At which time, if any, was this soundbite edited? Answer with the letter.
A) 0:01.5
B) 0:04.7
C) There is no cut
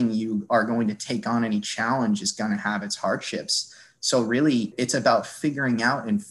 B